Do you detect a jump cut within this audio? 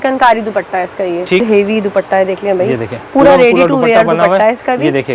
yes; 1 cut; at 1.4 s

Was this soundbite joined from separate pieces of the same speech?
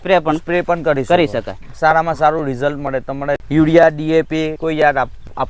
yes; 2 cuts; at 3.4 s, 4.6 s

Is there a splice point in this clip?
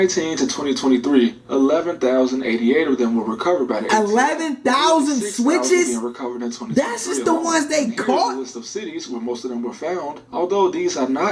no; 0 cuts

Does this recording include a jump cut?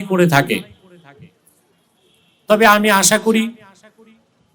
no; 0 cuts

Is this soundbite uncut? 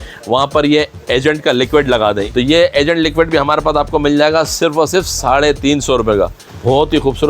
no; 2 cuts; at 2.2 s, 6.4 s

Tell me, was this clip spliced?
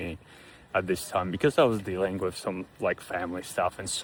no; 0 cuts

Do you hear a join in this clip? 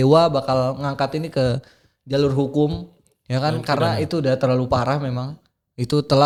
no; 0 cuts

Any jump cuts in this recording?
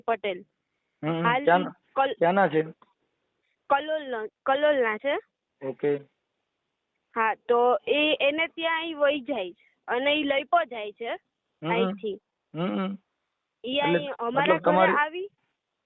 no; 0 cuts

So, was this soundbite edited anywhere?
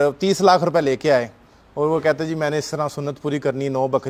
no; 0 cuts

